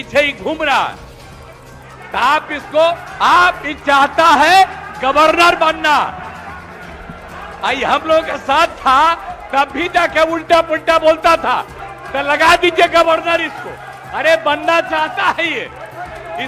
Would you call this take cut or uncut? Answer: uncut